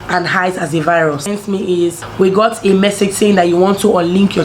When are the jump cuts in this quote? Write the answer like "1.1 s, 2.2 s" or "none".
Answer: 1.7 s